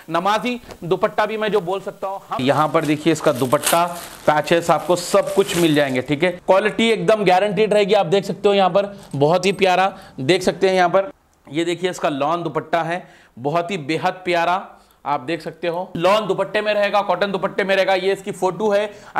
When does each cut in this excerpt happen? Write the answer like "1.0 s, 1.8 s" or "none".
2.4 s, 6.4 s, 11.2 s, 15.9 s